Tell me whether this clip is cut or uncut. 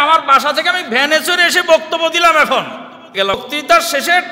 cut